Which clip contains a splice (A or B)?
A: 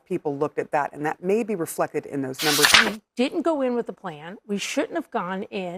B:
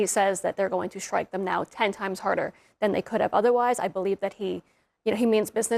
A